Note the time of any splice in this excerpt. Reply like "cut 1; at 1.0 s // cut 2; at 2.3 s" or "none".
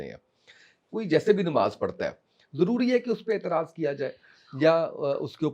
none